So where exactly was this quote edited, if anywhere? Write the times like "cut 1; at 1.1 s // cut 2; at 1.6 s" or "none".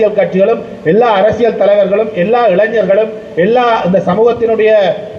none